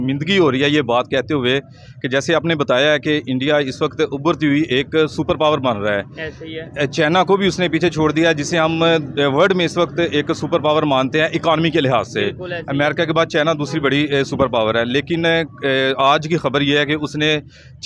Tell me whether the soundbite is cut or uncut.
uncut